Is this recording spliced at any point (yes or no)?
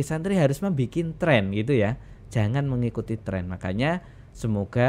no